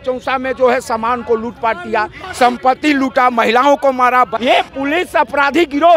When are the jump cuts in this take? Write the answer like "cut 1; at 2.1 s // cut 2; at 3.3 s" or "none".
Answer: cut 1; at 4.4 s